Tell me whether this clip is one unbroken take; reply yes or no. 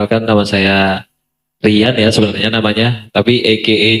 yes